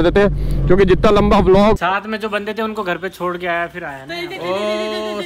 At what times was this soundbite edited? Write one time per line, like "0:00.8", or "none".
0:01.8